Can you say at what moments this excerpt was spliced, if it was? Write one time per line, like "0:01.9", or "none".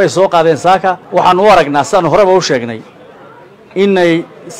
0:01.0